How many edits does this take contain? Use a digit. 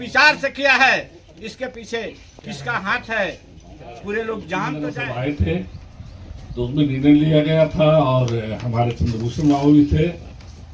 0